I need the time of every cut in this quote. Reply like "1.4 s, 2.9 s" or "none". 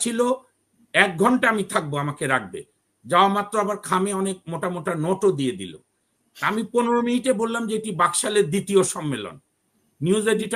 none